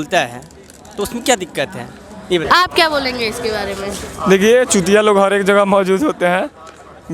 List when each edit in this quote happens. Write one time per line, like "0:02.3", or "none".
0:02.4